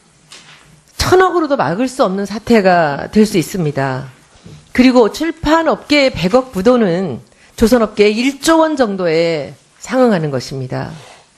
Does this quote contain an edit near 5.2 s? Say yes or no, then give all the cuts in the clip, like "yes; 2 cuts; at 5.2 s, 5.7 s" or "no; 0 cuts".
yes; 1 cut; at 5.2 s